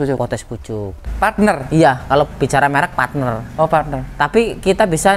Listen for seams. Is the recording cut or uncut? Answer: cut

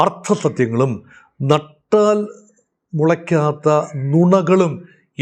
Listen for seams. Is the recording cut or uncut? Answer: uncut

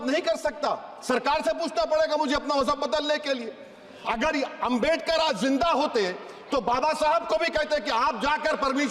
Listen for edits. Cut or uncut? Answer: uncut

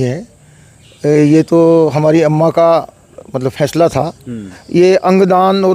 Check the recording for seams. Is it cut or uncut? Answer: cut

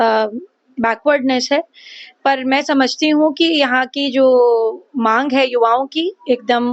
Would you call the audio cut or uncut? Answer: uncut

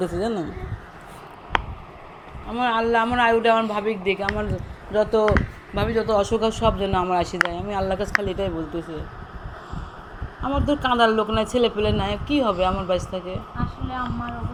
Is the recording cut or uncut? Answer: uncut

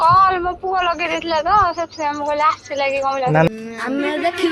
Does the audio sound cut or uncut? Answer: cut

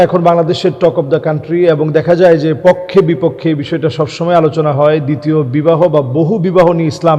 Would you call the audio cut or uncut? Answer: uncut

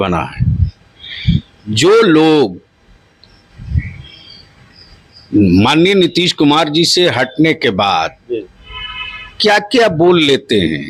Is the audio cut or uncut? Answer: uncut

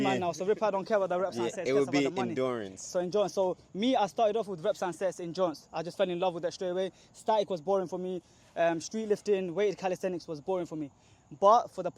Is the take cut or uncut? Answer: uncut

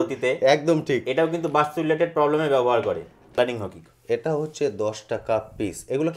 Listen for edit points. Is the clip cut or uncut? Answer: cut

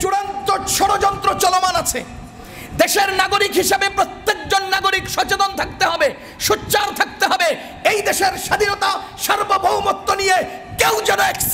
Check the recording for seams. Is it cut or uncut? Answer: uncut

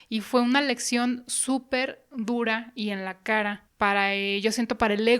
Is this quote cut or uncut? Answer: cut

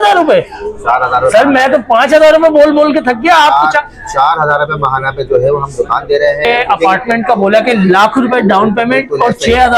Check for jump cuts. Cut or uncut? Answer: cut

